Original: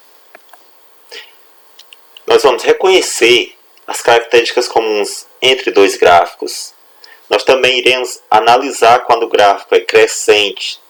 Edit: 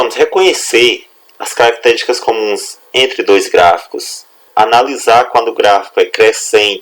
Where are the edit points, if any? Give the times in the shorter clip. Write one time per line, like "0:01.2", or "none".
0:04.4